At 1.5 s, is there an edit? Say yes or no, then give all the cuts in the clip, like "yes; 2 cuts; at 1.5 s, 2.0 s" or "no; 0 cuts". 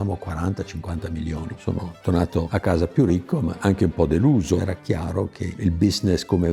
yes; 2 cuts; at 1.5 s, 4.6 s